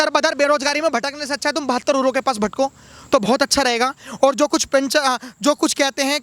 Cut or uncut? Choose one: uncut